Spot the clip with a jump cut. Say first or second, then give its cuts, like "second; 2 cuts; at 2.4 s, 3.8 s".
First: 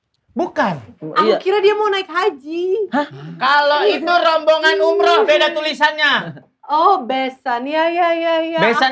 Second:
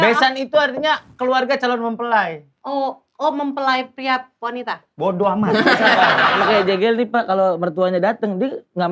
second; 1 cut; at 6.4 s